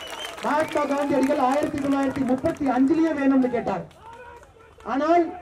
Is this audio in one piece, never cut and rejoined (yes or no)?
yes